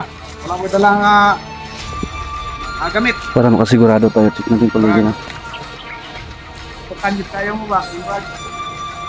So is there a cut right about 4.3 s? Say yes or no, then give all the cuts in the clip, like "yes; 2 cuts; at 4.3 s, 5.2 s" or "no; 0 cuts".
no; 3 cuts; at 5.6 s, 6.9 s, 8.2 s